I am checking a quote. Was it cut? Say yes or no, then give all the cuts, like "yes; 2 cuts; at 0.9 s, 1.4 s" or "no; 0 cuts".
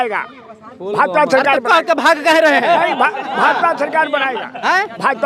no; 0 cuts